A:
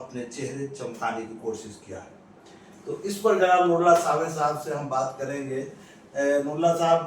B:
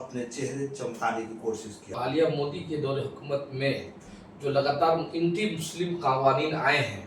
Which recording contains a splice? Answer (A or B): B